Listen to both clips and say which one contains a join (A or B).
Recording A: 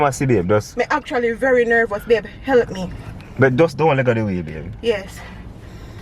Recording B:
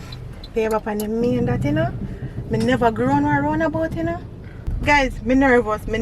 B